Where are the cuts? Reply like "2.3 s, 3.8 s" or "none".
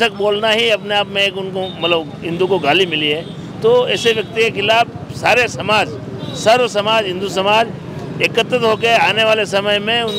none